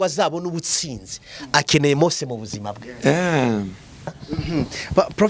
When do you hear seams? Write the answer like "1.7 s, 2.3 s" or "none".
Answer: 4.3 s